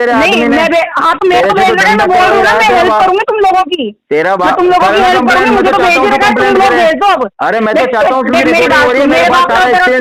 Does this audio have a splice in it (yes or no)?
no